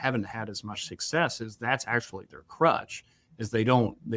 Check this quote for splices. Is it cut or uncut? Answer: uncut